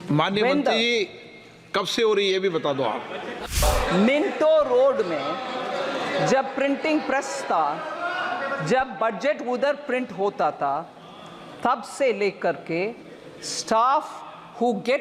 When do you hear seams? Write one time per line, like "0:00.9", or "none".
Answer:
0:03.4